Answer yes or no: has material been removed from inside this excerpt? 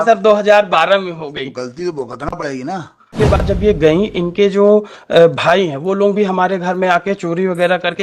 yes